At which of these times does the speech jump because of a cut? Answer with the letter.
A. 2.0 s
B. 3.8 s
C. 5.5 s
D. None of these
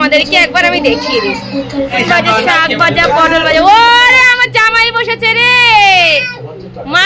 A